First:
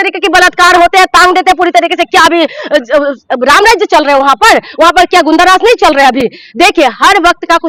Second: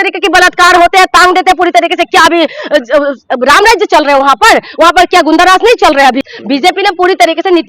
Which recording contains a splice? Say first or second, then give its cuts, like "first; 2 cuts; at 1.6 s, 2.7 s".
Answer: second; 1 cut; at 6.3 s